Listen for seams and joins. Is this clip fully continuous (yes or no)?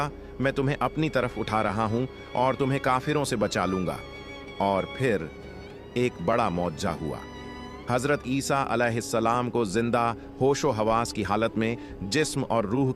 yes